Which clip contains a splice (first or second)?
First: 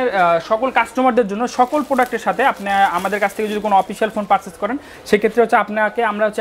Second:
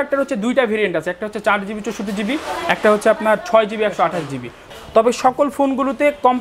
second